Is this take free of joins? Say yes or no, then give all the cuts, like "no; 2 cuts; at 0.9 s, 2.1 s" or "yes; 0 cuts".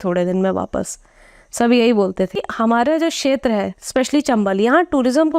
no; 1 cut; at 2.5 s